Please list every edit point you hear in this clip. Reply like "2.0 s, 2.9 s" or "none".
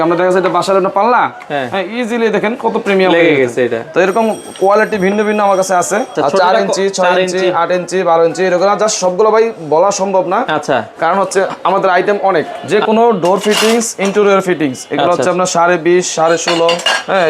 6.1 s, 12.6 s